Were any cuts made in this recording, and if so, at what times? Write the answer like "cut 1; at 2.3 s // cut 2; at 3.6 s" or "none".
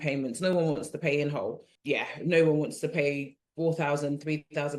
cut 1; at 1.7 s // cut 2; at 3.4 s